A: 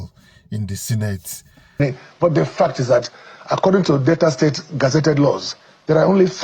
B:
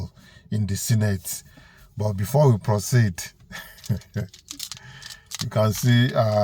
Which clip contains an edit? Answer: A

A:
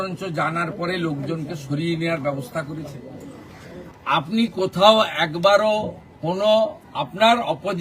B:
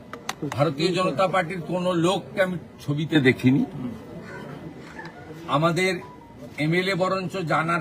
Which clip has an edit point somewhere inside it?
A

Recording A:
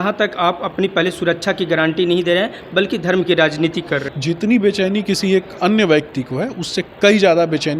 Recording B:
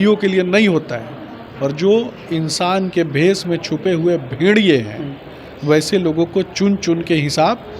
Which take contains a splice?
A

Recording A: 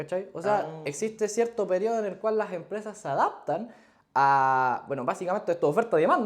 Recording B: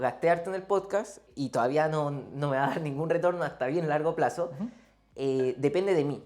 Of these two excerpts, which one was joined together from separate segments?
B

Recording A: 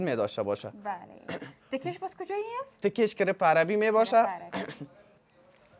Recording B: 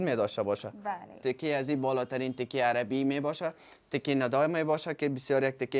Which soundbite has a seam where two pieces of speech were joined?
B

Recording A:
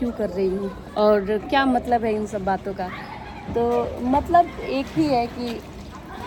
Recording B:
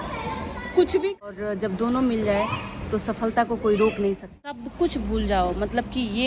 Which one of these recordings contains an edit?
B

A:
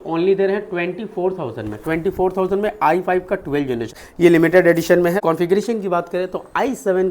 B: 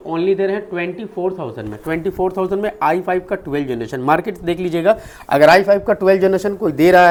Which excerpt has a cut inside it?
A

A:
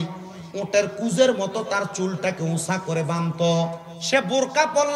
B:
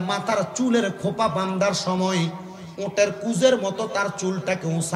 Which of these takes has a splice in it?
A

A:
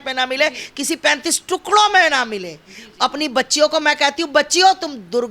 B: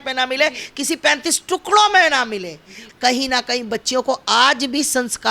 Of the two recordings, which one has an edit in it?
B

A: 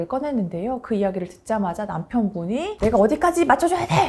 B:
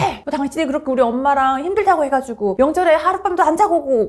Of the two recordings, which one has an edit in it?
A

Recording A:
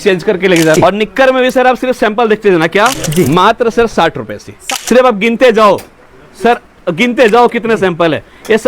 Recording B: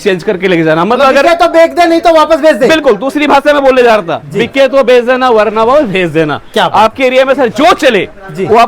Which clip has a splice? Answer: A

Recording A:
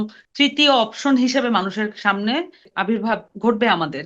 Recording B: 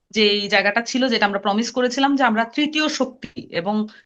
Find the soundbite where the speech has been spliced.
A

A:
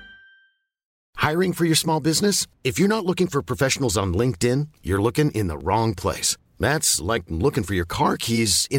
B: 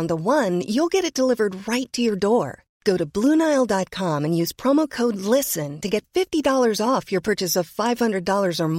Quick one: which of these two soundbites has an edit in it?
A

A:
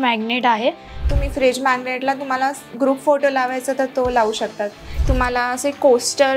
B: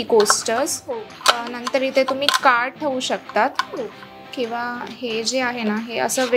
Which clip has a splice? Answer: A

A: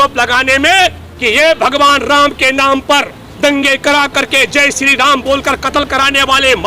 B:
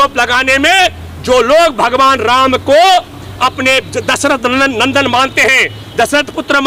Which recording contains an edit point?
A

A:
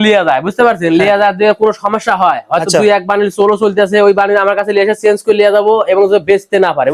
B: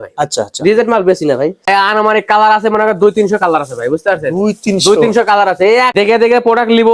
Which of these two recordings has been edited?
B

